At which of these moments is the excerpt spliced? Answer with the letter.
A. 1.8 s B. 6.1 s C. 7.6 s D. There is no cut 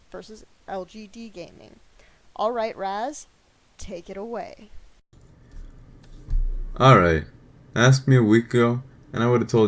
C